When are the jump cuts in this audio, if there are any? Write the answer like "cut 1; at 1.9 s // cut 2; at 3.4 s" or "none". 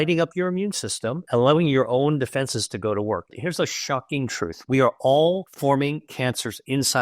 cut 1; at 1.2 s // cut 2; at 3.3 s // cut 3; at 5.5 s